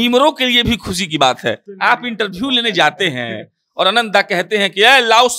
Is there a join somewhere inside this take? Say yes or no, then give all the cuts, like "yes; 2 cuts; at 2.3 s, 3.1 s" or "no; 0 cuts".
yes; 1 cut; at 1.7 s